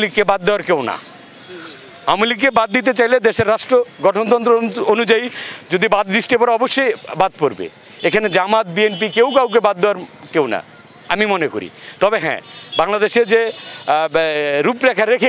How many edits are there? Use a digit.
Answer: 0